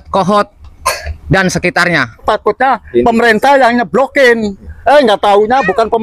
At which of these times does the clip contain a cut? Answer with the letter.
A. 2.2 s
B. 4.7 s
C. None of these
A